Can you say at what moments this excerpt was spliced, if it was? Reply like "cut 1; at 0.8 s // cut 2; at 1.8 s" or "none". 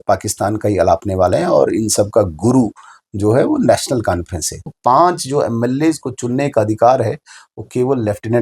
cut 1; at 4.7 s